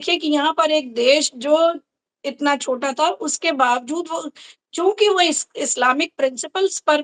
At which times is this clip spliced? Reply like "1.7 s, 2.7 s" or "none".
none